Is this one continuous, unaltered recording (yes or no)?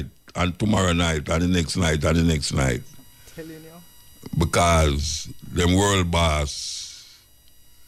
yes